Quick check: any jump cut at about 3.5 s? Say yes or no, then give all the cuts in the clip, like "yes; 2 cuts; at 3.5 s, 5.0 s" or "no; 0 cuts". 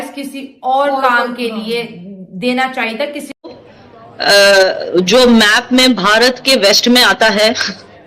yes; 1 cut; at 3.5 s